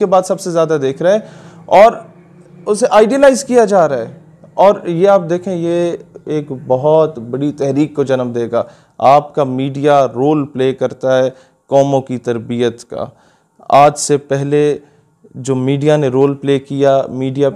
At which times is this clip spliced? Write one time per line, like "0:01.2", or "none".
none